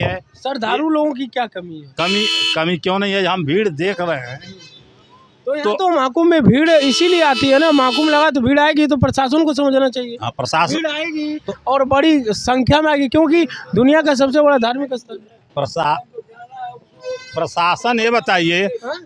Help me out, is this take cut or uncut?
uncut